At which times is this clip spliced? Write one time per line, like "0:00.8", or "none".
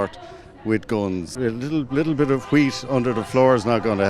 0:01.3